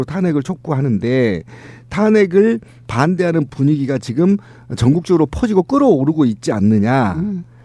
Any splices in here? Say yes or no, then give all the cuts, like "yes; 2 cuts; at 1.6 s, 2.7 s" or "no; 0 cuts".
no; 0 cuts